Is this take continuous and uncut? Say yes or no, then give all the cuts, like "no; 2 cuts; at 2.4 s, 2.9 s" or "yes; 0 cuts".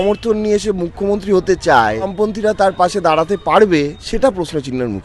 no; 2 cuts; at 2.1 s, 4.0 s